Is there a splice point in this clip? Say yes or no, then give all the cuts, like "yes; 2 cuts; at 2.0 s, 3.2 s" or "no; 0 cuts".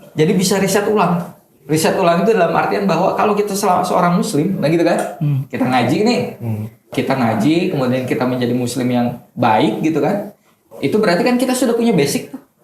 yes; 2 cuts; at 6.9 s, 10.7 s